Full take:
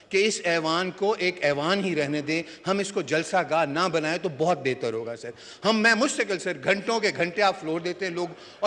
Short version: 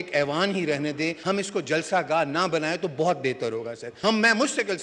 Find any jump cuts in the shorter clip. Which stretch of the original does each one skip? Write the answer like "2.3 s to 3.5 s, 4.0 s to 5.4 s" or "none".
2.5 s to 2.6 s, 5.2 s to 5.4 s